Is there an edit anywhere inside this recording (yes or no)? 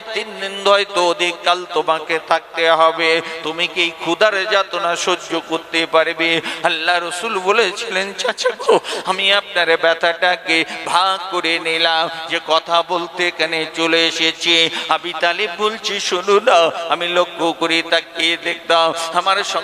no